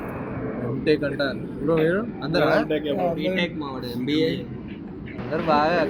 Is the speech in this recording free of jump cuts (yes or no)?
yes